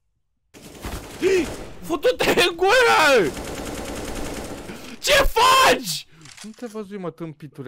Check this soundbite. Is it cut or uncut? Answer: uncut